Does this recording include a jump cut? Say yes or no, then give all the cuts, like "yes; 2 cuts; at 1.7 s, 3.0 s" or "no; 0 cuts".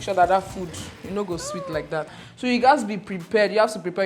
yes; 1 cut; at 2.1 s